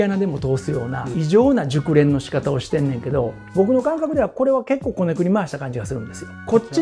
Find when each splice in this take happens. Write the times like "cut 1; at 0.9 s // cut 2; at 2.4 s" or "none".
cut 1; at 1.1 s // cut 2; at 3.4 s